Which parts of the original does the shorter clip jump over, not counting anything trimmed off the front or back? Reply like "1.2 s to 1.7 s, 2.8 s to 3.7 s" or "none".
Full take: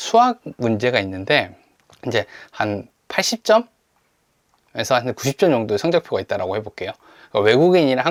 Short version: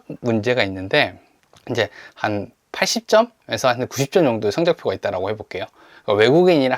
3.8 s to 4.7 s